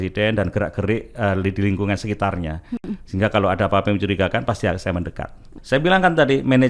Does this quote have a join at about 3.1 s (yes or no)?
no